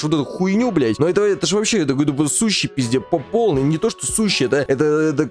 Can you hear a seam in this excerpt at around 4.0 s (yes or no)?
no